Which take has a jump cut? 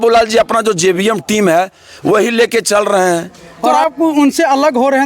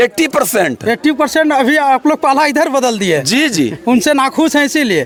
first; 1 cut; at 3.8 s

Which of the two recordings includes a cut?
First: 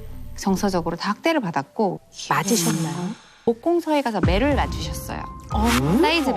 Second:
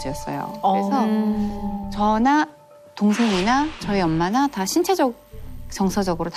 first; 2 cuts; at 2.0 s, 3.5 s

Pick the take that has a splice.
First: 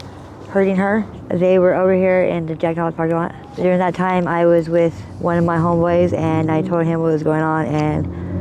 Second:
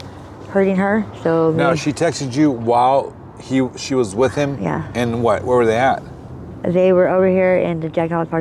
first; 3 cuts; at 1.1 s, 3.5 s, 5.1 s

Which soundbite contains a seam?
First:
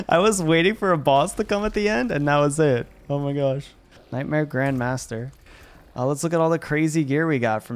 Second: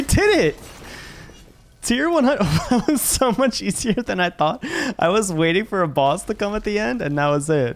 first; 1 cut; at 4.1 s

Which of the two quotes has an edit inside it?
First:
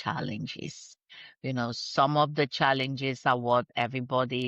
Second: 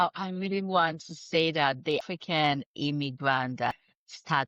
second; 2 cuts; at 2.0 s, 3.7 s

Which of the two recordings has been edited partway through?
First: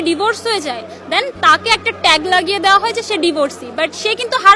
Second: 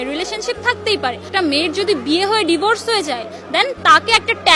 second; 1 cut; at 1.2 s

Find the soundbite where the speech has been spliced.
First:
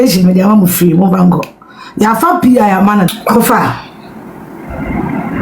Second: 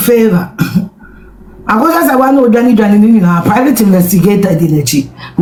first; 1 cut; at 3.1 s

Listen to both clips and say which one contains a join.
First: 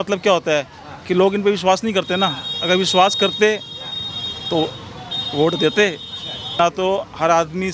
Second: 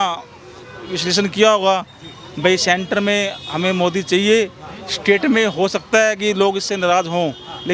first; 1 cut; at 6.6 s

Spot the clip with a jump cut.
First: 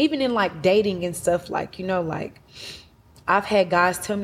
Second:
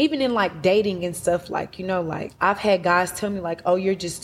second; 1 cut; at 2.3 s

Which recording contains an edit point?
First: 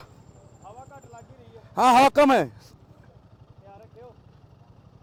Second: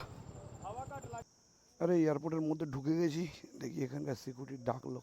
second; 1 cut; at 1.3 s

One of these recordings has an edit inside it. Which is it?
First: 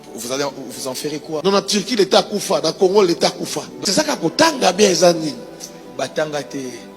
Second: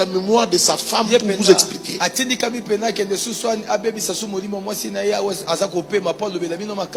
first; 1 cut; at 3.7 s

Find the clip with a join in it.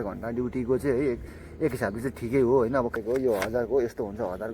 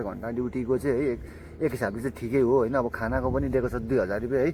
first; 1 cut; at 3.0 s

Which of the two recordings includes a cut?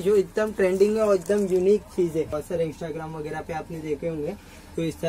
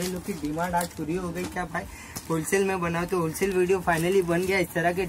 first; 1 cut; at 2.4 s

